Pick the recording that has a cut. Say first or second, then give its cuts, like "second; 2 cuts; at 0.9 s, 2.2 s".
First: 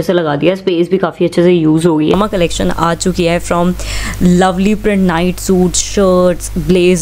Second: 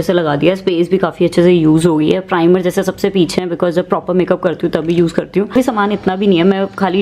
first; 1 cut; at 2.2 s